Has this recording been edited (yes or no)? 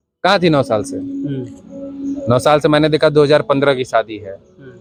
no